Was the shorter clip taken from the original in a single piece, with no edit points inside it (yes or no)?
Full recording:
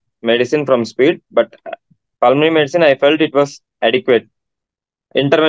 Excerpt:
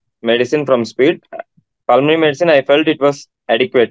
no